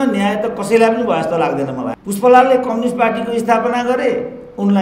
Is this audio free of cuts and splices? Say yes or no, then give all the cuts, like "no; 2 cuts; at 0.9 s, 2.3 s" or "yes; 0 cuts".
no; 1 cut; at 1.9 s